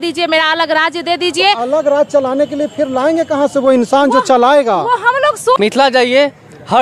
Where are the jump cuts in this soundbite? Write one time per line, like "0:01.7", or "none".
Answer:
0:05.6